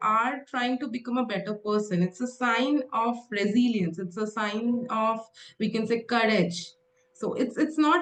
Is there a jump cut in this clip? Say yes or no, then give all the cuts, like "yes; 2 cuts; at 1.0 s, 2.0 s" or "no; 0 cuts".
no; 0 cuts